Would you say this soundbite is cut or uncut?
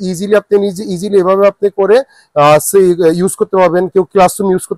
uncut